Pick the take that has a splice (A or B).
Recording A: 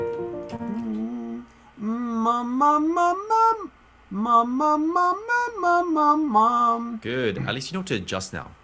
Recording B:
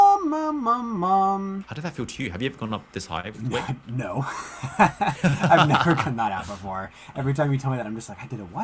B